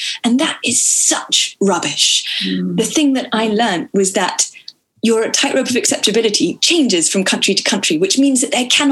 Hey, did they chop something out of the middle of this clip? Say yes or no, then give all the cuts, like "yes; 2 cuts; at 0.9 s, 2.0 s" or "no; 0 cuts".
no; 0 cuts